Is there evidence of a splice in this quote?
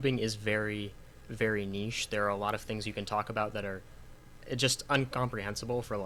no; 0 cuts

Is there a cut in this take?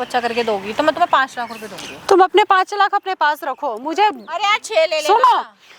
no; 0 cuts

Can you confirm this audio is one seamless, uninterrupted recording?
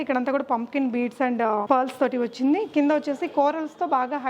no; 1 cut; at 1.6 s

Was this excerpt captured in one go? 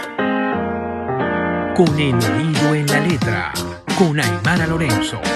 yes; 0 cuts

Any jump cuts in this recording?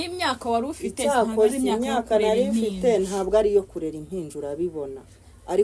no; 0 cuts

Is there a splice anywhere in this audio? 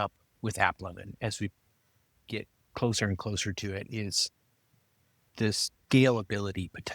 yes; 1 cut; at 1.1 s

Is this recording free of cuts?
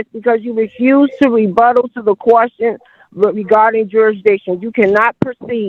yes; 0 cuts

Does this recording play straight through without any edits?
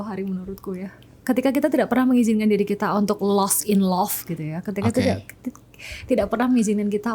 yes; 0 cuts

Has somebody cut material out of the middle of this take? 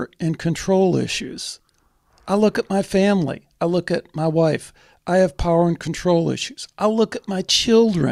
no; 0 cuts

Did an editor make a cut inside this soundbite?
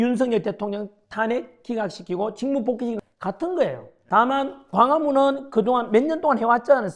yes; 1 cut; at 3.0 s

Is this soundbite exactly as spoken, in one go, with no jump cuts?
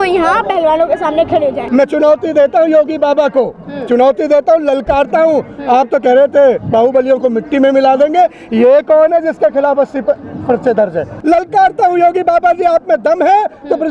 no; 2 cuts; at 1.6 s, 11.1 s

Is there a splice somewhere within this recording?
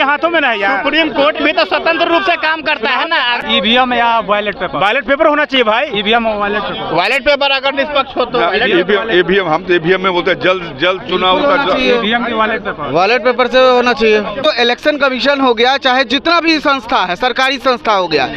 yes; 2 cuts; at 3.4 s, 14.4 s

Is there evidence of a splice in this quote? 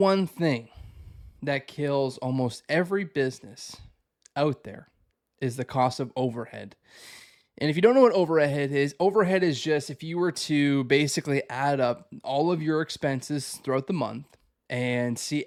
no; 0 cuts

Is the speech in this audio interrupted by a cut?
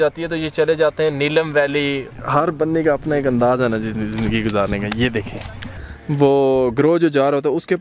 yes; 2 cuts; at 2.1 s, 5.7 s

